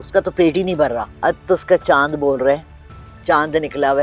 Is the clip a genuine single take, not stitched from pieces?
no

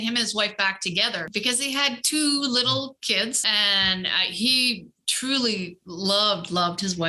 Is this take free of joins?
no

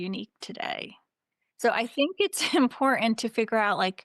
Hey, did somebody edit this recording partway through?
no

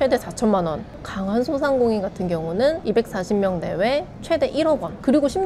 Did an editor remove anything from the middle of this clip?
no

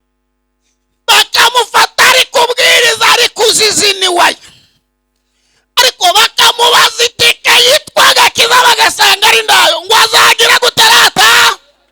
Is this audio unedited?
yes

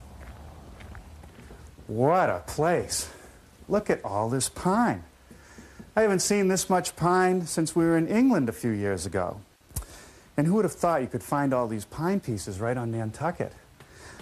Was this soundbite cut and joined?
yes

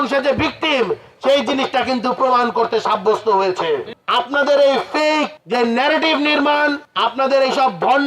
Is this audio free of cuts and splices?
no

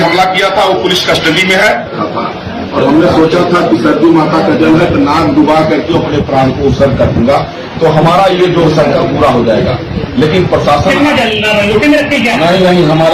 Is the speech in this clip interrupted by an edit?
yes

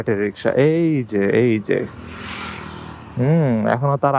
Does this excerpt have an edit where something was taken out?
no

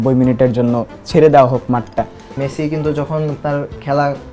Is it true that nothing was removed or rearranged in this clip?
no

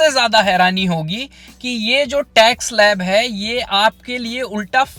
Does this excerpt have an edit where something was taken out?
no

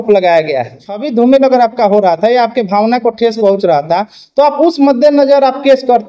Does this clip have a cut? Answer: yes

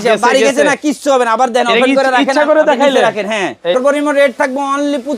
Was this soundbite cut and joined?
yes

